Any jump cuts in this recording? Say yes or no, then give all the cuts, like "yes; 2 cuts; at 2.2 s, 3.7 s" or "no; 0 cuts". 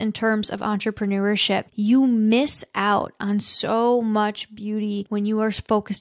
yes; 2 cuts; at 1.7 s, 5.0 s